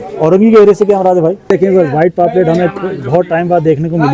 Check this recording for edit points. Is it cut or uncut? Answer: cut